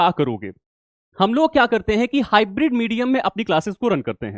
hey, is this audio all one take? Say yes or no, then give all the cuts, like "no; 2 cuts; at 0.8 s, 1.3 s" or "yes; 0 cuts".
yes; 0 cuts